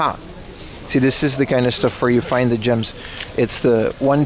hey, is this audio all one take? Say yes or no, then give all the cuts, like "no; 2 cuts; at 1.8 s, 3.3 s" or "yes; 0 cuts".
yes; 0 cuts